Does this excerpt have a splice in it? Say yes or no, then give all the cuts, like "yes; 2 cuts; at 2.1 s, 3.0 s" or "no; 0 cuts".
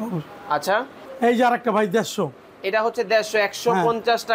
yes; 1 cut; at 1.0 s